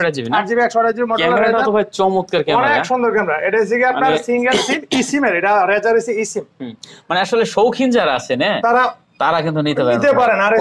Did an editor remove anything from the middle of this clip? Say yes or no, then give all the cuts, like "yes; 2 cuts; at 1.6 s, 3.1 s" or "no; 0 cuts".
no; 0 cuts